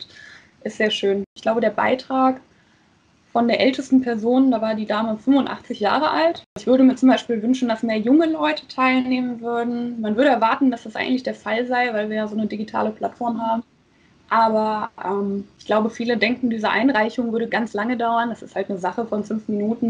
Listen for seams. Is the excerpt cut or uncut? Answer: cut